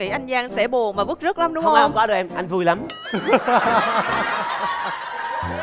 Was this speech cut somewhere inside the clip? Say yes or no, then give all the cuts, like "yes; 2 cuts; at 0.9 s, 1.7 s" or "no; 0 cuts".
no; 0 cuts